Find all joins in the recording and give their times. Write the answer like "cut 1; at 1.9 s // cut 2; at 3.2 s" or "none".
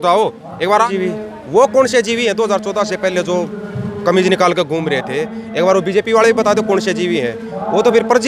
cut 1; at 0.9 s